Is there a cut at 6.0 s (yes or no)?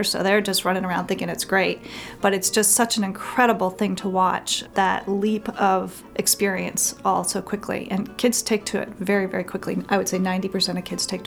yes